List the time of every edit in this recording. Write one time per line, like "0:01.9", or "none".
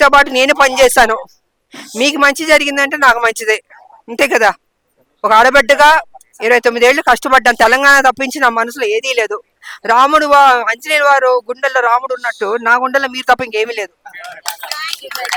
none

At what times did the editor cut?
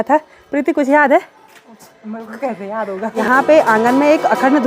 0:03.1

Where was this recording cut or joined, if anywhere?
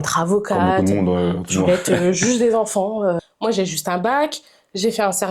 0:03.2

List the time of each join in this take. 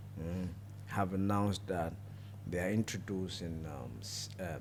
none

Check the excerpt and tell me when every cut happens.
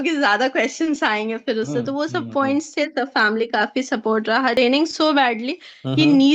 0:04.6

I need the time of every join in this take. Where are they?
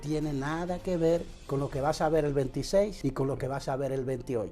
0:01.4
0:02.9

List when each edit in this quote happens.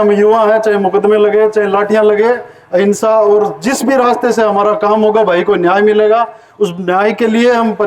none

